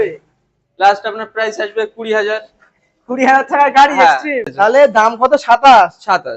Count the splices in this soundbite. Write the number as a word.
one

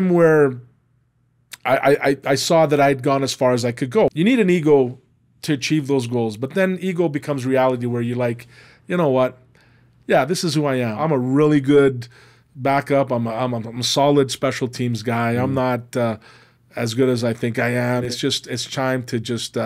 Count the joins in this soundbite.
three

